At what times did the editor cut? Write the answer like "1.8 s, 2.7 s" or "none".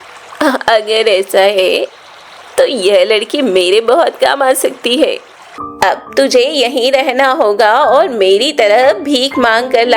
5.6 s